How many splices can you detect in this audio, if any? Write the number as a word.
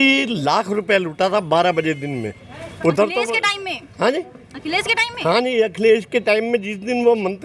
zero